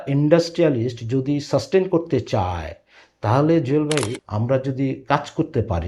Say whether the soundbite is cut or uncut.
cut